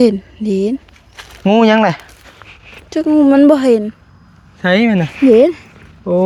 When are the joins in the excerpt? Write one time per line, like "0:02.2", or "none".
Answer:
none